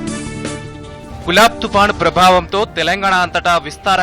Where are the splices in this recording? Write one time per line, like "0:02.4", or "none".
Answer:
0:01.0